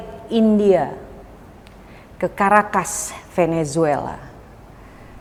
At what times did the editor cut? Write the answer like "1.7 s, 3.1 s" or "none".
none